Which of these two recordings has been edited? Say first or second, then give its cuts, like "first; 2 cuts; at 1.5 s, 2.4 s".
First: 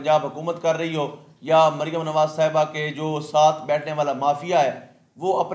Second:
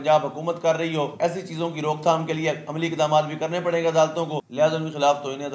second; 2 cuts; at 1.1 s, 4.4 s